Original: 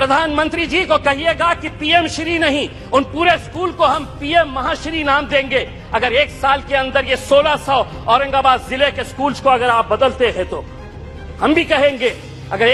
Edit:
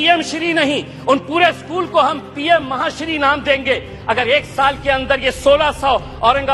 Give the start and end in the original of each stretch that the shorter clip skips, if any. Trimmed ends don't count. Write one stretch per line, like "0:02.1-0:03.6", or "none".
none